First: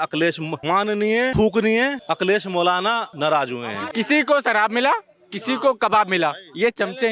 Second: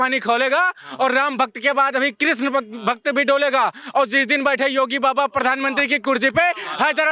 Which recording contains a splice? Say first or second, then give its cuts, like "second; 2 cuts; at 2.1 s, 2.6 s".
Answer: first; 4 cuts; at 0.8 s, 2.0 s, 3.1 s, 3.8 s